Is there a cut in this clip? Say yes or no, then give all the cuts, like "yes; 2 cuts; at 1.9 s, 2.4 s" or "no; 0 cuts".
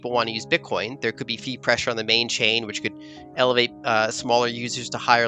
no; 0 cuts